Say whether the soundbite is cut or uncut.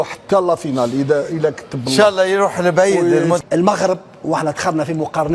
cut